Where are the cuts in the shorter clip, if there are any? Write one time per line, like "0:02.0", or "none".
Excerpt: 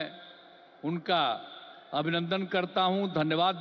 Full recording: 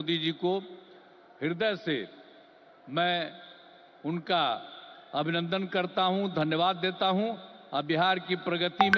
none